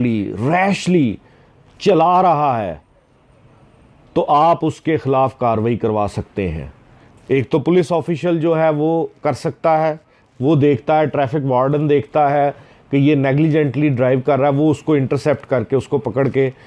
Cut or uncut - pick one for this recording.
uncut